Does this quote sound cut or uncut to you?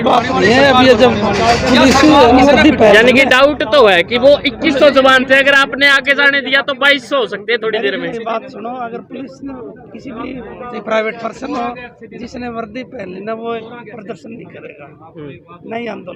uncut